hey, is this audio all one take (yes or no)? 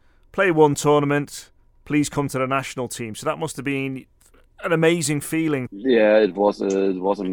yes